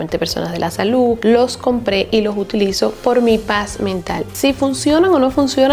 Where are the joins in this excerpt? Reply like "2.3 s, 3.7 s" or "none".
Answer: 1.2 s